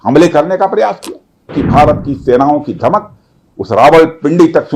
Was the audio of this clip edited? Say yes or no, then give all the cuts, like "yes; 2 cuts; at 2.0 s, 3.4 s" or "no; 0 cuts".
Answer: yes; 1 cut; at 1.5 s